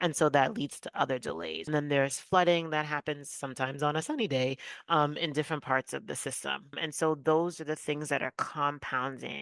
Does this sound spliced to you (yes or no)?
yes